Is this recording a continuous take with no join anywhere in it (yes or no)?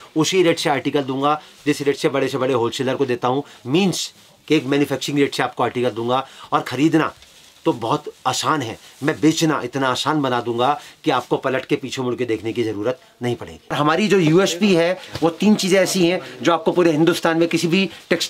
no